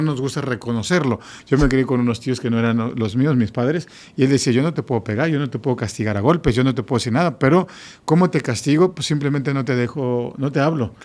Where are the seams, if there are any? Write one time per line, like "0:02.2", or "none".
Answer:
0:01.3